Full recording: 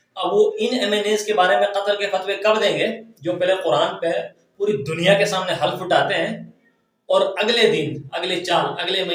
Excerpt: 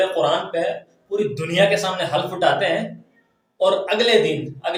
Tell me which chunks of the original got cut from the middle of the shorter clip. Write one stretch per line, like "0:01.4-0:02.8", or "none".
none